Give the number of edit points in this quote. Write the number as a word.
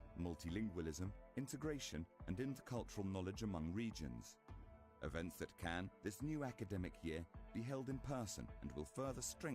one